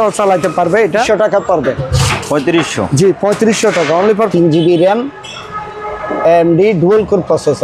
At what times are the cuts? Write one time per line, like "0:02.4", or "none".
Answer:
0:01.1
0:04.3